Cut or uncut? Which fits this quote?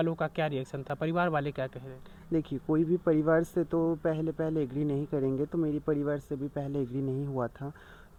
uncut